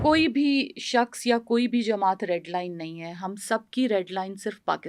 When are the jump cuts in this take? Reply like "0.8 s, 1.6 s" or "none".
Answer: none